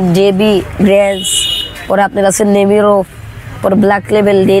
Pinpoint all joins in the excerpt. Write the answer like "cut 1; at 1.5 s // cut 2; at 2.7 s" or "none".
none